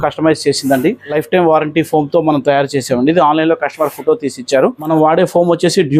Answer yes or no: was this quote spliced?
yes